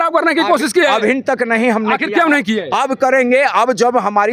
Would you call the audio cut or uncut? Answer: uncut